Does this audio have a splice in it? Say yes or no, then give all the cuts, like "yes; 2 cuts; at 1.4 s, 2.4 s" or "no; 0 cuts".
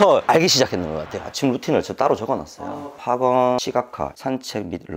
yes; 2 cuts; at 1.2 s, 4.0 s